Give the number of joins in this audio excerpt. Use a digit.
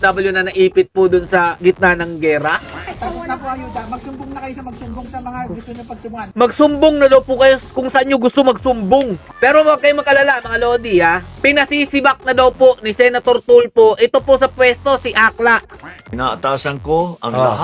4